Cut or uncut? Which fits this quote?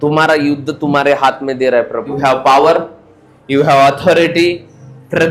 cut